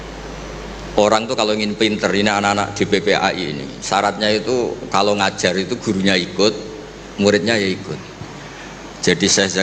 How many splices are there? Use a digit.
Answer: 0